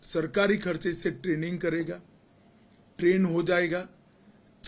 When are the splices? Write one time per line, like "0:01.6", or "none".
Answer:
none

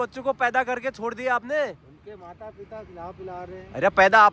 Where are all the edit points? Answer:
none

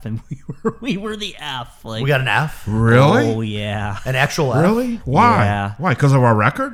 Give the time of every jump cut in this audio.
none

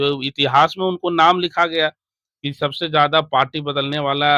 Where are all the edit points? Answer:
none

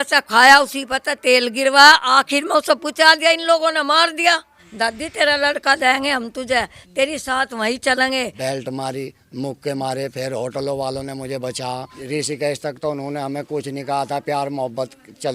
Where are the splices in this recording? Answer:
0:04.6
0:08.3
0:12.0

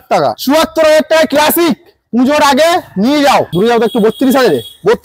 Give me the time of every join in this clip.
0:03.5

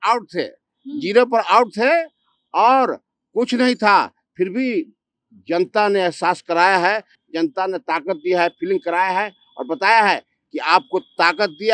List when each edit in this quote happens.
none

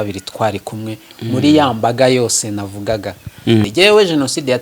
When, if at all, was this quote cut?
0:03.7

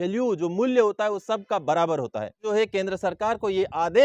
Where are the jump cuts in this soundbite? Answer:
0:02.4

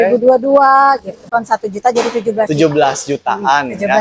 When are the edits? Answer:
0:01.3

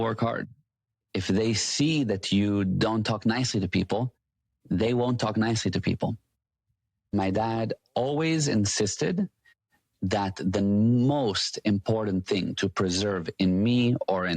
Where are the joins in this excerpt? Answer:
0:07.1

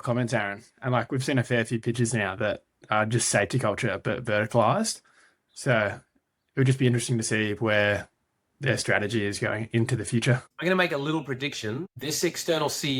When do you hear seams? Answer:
0:10.5

